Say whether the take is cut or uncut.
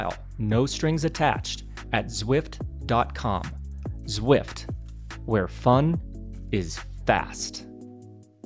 cut